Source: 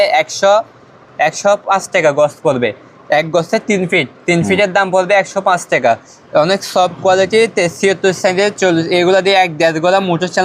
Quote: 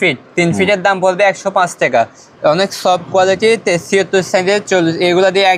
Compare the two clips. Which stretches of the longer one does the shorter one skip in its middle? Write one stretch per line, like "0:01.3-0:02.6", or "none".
none